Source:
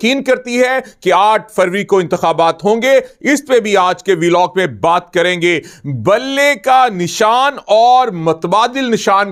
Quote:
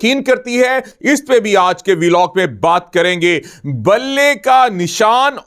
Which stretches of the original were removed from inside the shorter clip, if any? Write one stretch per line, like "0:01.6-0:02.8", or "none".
0:00.9-0:03.1